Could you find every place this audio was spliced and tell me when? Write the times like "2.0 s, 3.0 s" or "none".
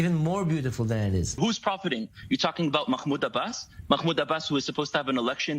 1.4 s